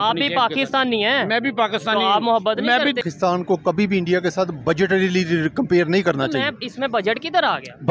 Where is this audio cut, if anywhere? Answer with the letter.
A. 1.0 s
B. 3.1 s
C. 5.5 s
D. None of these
B